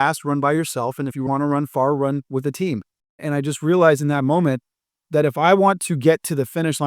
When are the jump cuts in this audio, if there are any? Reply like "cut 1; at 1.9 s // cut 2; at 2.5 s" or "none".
cut 1; at 3.2 s

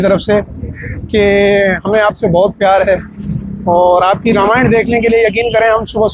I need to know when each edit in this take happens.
none

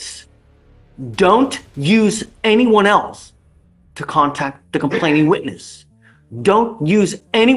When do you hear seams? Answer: none

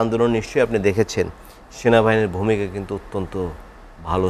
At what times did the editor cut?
none

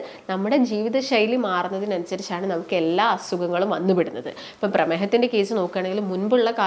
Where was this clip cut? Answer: none

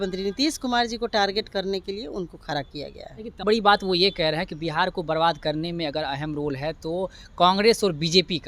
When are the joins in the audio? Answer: cut 1; at 3.4 s

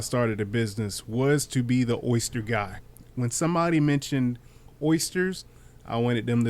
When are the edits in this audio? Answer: cut 1; at 3.1 s

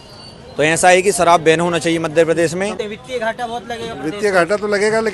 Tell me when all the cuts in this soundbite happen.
cut 1; at 2.8 s

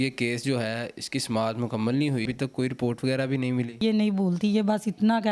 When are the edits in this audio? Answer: cut 1; at 2.2 s // cut 2; at 3.8 s

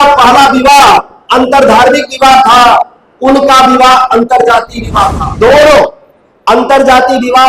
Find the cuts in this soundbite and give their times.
cut 1; at 5.2 s

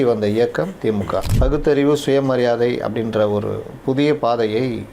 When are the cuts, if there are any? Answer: cut 1; at 1.3 s

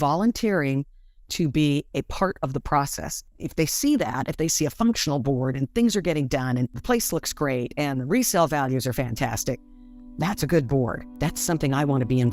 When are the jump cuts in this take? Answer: cut 1; at 3.1 s // cut 2; at 6.8 s // cut 3; at 11.1 s

